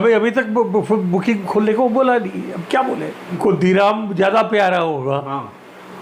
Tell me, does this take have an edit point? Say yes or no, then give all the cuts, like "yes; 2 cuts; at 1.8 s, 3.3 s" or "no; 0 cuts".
yes; 1 cut; at 3.4 s